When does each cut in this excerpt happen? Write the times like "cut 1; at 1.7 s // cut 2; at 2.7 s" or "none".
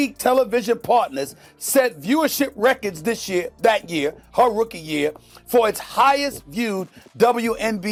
none